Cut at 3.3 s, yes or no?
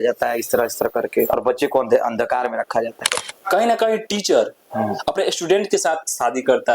yes